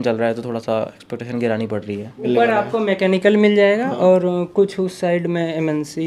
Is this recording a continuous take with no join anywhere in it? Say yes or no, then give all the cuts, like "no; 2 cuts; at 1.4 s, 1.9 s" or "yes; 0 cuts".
no; 1 cut; at 2.3 s